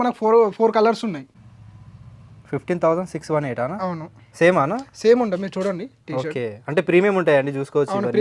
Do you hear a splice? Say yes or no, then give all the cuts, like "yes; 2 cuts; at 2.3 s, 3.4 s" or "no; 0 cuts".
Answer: yes; 1 cut; at 1.3 s